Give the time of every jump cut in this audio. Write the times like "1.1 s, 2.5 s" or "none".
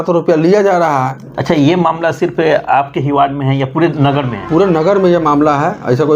1.2 s